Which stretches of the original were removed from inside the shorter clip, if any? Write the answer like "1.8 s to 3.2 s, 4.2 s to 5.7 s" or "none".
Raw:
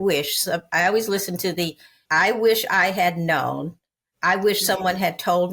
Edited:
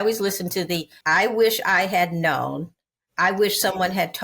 1.8 s to 2.0 s

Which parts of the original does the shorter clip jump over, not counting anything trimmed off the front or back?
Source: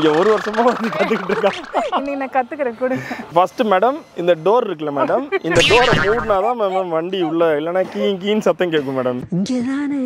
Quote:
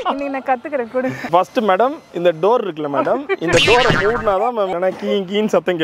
3.1 s to 3.2 s, 6.7 s to 7.6 s

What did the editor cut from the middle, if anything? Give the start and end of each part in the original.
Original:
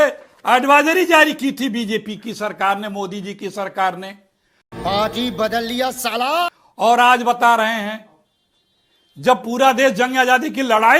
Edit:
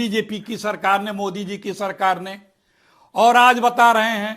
4.7 s to 6.6 s

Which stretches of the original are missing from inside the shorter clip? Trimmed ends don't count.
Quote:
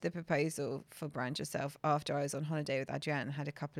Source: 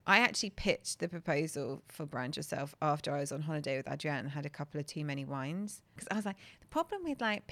none

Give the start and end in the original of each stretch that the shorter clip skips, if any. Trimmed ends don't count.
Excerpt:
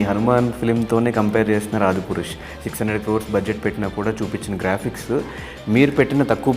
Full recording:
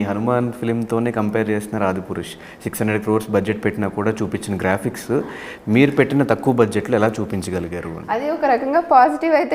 none

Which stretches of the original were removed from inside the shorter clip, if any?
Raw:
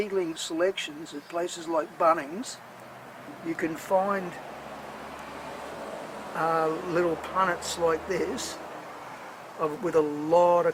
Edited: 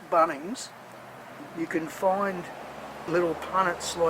4.9 s to 6.9 s

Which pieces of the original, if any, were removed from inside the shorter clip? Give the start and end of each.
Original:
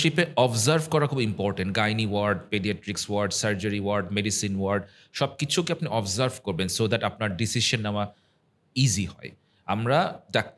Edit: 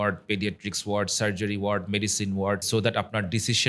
4.9 s to 6.7 s

